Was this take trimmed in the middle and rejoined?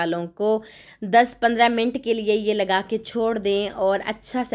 no; 0 cuts

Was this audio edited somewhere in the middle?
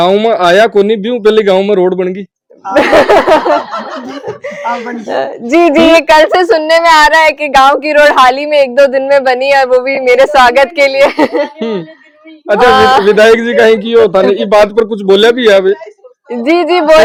no; 0 cuts

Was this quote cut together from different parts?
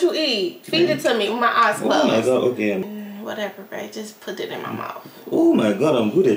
yes; 1 cut; at 2.8 s

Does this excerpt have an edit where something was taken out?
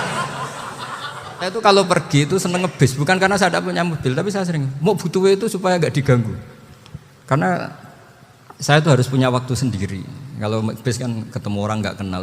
yes; 1 cut; at 1.6 s

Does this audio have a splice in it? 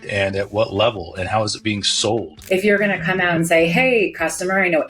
yes; 1 cut; at 2.3 s

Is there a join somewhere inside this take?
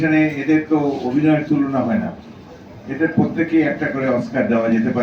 no; 0 cuts

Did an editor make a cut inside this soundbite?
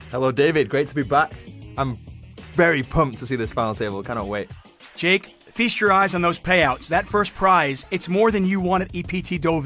yes; 1 cut; at 8.0 s

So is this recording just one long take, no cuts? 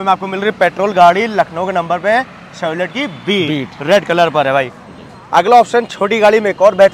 yes; 0 cuts

